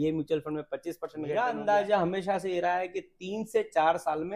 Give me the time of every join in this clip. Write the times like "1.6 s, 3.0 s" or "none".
1.3 s